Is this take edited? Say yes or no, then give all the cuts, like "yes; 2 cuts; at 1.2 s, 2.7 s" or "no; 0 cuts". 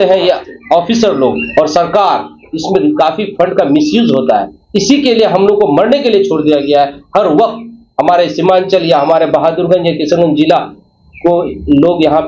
no; 0 cuts